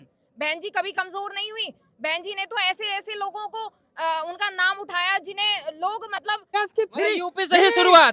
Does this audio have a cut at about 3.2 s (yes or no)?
no